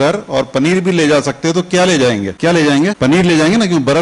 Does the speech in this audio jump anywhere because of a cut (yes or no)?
yes